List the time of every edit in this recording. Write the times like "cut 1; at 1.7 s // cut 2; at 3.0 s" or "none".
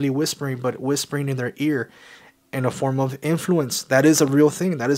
none